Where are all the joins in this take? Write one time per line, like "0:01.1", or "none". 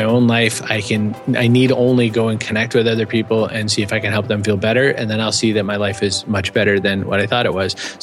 none

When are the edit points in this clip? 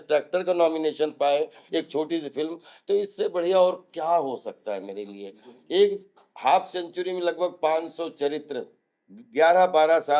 none

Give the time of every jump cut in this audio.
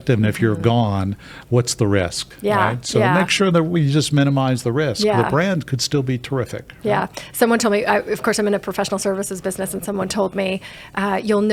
none

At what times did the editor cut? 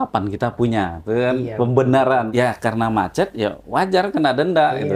0:02.3

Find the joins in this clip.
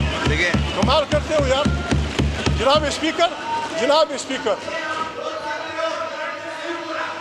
none

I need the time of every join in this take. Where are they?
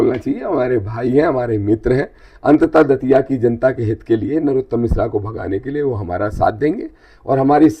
none

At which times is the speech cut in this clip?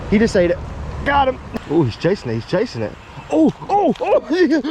0:01.5

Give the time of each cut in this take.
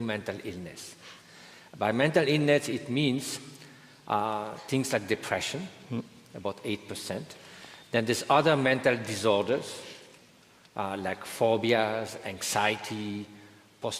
0:10.7

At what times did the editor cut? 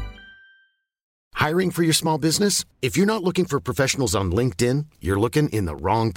0:01.1

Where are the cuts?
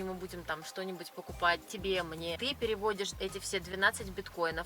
0:02.4
0:03.1

